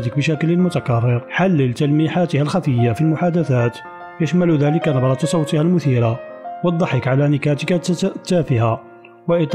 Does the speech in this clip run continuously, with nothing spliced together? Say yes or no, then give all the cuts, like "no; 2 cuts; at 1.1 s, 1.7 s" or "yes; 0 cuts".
no; 1 cut; at 1.3 s